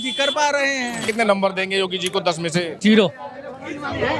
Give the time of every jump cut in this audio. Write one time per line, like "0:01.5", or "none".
0:01.1
0:02.7